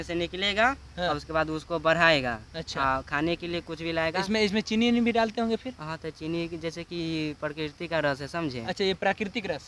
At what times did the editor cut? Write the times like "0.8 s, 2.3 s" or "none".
none